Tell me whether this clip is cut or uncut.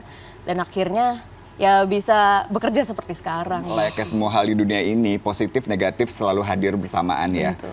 cut